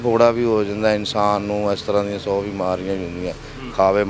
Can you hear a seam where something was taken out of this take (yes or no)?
no